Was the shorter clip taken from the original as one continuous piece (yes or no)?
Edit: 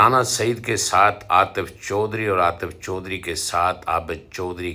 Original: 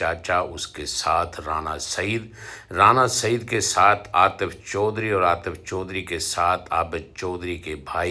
yes